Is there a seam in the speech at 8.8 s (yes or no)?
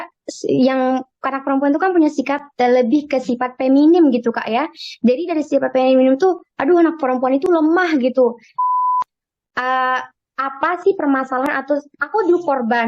yes